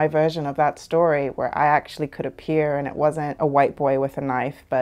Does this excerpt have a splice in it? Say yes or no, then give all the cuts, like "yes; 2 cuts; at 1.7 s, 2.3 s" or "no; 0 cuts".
yes; 1 cut; at 3.3 s